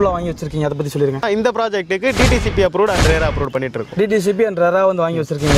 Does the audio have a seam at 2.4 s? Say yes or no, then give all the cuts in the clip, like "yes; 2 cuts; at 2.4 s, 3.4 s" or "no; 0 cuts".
no; 0 cuts